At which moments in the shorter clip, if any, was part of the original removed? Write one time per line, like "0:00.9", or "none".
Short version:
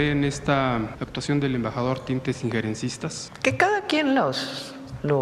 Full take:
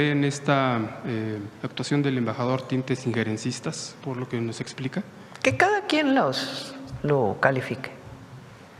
0:01.0
0:03.2